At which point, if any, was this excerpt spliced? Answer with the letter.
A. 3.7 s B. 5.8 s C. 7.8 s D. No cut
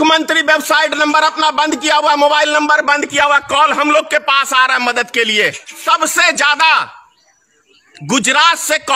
B